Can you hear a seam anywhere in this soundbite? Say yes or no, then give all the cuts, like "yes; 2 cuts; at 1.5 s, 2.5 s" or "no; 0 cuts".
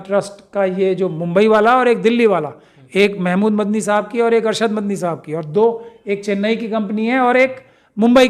no; 0 cuts